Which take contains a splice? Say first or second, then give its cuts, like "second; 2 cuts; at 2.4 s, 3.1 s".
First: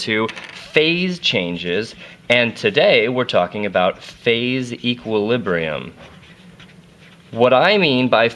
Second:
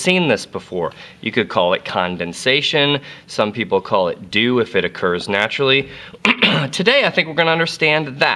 first; 1 cut; at 2.7 s